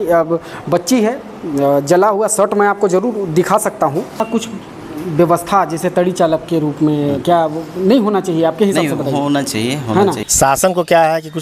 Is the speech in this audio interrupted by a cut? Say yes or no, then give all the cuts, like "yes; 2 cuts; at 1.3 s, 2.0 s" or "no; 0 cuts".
yes; 2 cuts; at 4.2 s, 10.2 s